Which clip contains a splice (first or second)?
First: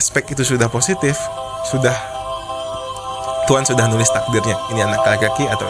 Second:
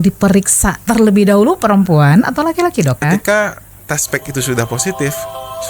second